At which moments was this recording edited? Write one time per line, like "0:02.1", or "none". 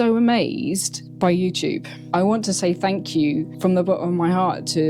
0:01.0
0:01.9
0:03.5